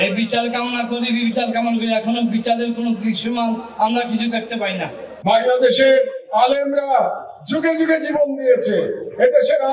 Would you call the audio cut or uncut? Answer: cut